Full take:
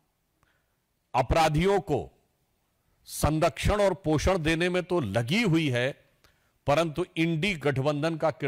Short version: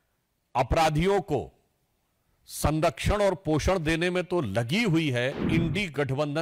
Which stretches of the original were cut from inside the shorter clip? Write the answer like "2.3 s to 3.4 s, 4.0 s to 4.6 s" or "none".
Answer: 6.0 s to 7.1 s